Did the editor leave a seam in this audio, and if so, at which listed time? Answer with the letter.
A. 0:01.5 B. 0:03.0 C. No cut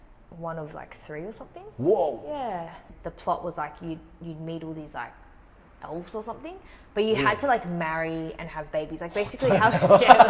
B